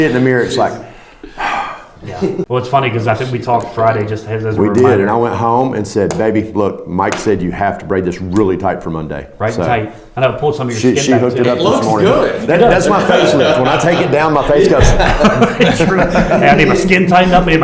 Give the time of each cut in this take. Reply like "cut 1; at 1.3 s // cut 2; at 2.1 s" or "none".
cut 1; at 2.5 s